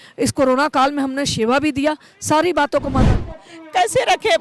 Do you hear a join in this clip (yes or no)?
yes